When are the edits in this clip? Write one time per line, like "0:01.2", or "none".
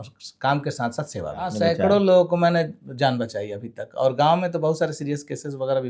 0:01.5

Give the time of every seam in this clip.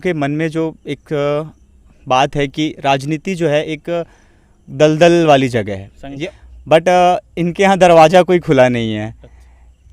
0:06.2

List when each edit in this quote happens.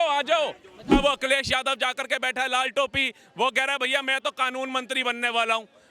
0:00.9

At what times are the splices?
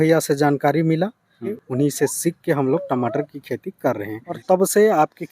0:01.4
0:04.3

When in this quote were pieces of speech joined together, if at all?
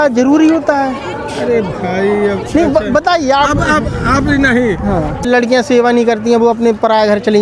0:05.3

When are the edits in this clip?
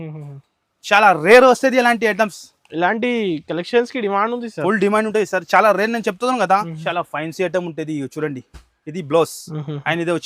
0:06.8

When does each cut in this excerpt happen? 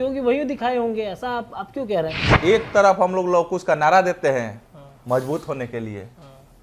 0:02.2

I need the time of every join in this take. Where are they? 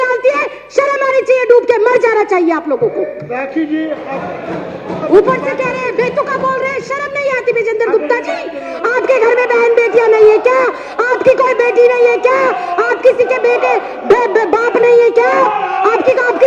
none

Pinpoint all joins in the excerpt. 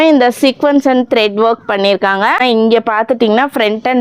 0:02.4

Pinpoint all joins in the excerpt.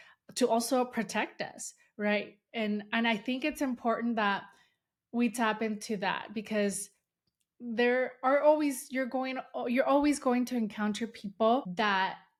none

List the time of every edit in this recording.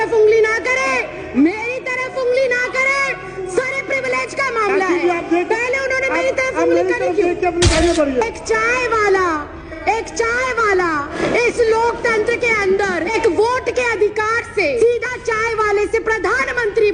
0:07.7
0:11.1
0:13.1
0:14.8

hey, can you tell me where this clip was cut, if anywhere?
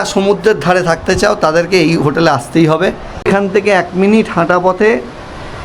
0:03.1

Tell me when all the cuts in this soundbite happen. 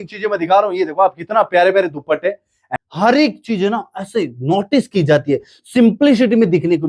0:02.6

